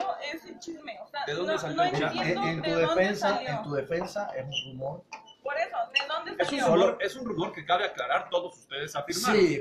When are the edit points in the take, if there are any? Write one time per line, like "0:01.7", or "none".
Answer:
0:06.0